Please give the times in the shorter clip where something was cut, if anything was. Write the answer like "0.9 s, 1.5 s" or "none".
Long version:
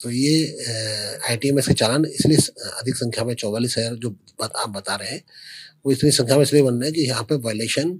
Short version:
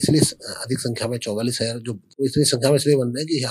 2.0 s